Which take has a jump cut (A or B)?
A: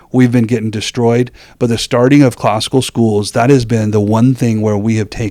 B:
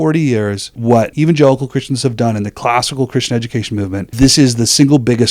B